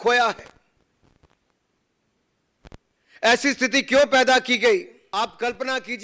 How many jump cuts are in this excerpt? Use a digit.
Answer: 1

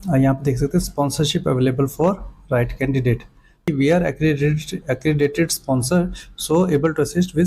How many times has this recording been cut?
1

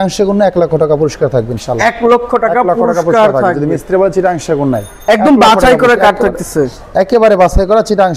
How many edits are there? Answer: 1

